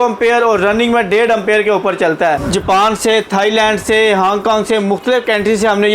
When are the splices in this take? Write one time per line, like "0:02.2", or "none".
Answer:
0:02.4